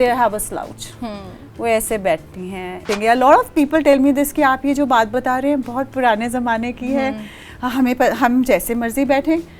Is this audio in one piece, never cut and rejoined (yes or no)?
no